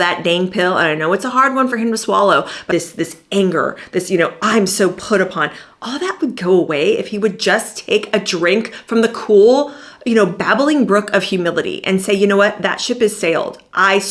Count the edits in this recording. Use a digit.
1